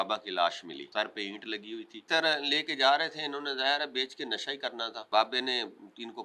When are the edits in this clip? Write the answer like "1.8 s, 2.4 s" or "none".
0.8 s, 2.1 s, 5.0 s